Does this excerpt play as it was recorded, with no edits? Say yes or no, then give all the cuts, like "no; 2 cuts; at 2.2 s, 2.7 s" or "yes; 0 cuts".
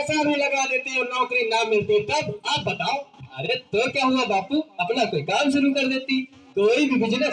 yes; 0 cuts